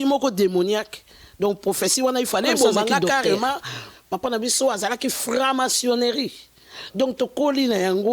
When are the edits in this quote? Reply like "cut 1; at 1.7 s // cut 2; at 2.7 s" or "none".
cut 1; at 4.0 s